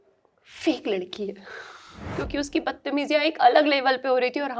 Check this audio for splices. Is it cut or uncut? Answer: cut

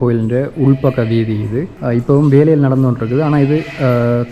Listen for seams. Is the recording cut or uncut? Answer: cut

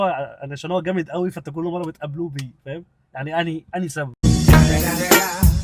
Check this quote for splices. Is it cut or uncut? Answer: uncut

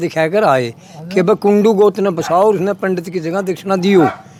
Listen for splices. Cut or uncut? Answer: uncut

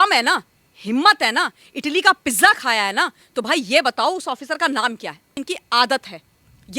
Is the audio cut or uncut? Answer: cut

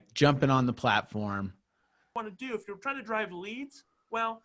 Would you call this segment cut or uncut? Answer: cut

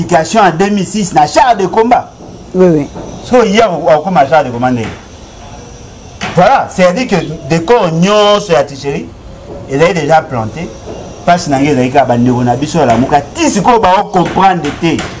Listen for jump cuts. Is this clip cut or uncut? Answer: uncut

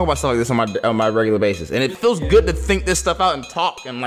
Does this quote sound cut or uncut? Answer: cut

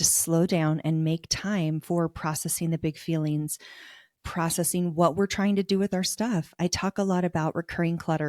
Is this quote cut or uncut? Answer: uncut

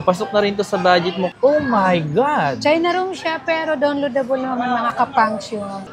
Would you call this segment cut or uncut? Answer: cut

